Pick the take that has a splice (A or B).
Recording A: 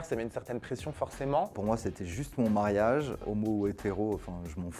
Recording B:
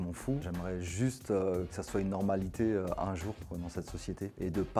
A